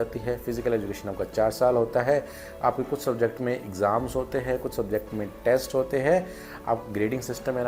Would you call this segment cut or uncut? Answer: uncut